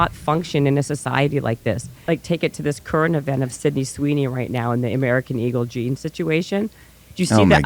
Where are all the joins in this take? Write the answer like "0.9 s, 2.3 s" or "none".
2.0 s